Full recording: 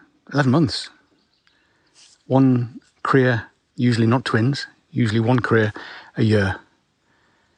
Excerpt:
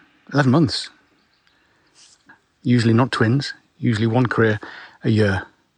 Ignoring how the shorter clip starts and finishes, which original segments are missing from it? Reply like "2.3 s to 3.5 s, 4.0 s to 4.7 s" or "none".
2.2 s to 3.4 s